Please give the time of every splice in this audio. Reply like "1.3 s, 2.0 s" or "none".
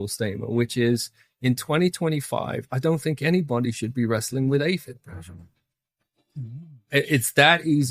none